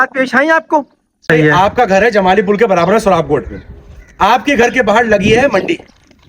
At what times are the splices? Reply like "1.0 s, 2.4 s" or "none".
1.3 s